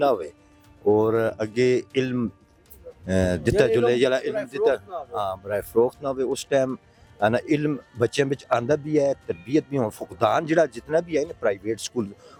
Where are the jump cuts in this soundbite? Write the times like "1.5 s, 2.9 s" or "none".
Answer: none